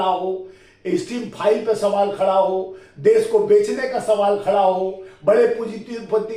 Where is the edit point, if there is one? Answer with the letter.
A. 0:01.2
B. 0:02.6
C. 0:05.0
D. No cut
D